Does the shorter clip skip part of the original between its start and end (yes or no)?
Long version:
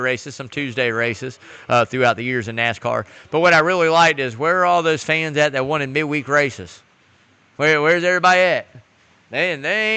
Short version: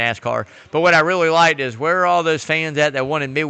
no